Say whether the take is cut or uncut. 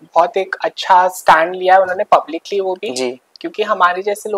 uncut